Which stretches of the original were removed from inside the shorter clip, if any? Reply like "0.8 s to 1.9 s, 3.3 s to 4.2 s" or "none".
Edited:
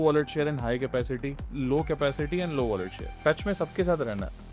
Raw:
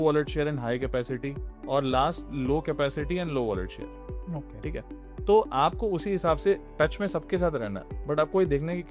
1.5 s to 2.2 s, 3.9 s to 6.7 s